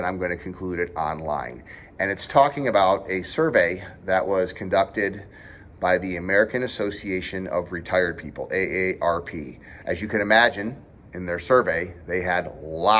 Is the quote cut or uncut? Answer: uncut